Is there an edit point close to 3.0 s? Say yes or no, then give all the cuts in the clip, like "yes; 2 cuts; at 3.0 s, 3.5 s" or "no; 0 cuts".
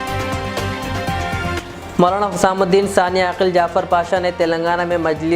no; 1 cut; at 1.6 s